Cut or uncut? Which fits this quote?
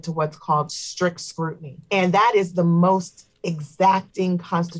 cut